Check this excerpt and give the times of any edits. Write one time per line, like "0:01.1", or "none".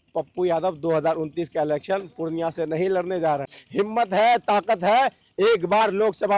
0:03.6

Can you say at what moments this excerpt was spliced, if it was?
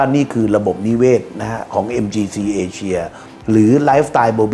none

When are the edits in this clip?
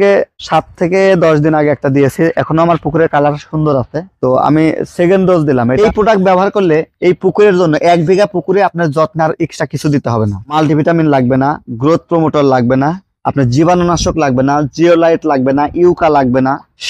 0:05.8

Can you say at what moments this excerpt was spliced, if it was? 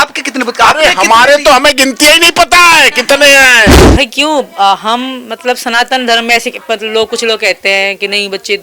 0:03.8

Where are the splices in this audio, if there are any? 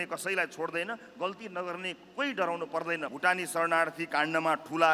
0:03.1

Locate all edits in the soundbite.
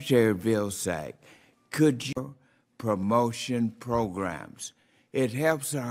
none

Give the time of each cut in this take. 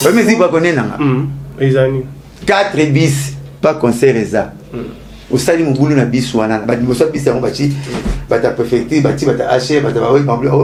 none

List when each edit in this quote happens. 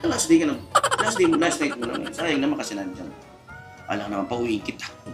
none

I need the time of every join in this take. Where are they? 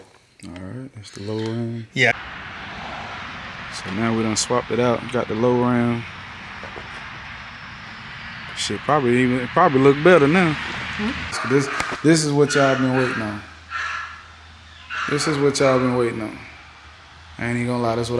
0:02.1
0:11.4

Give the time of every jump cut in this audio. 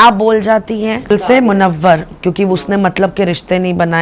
0:01.1

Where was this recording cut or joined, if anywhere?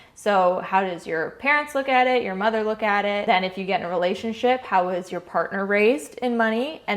0:03.2

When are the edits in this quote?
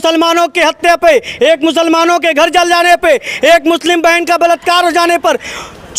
none

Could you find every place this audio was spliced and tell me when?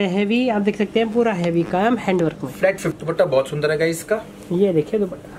0:02.9

